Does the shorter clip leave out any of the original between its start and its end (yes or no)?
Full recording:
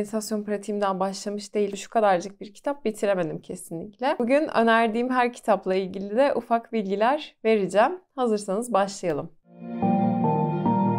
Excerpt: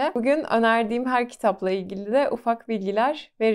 no